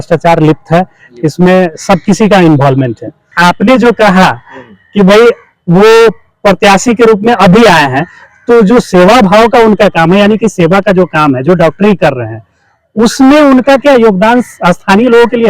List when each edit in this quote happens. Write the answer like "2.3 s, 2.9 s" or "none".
3.3 s